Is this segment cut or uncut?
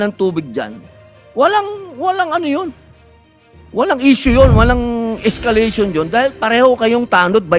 uncut